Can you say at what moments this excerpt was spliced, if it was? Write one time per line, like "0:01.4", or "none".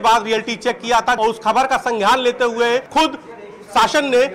0:01.2
0:02.9